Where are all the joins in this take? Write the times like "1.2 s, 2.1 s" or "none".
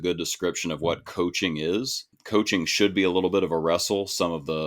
2.1 s